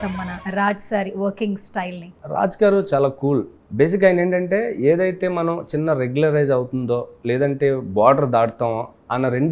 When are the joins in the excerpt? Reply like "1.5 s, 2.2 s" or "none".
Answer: 3.6 s